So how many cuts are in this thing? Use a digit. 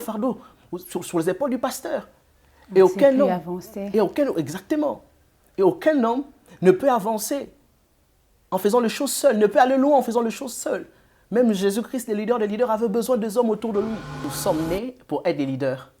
1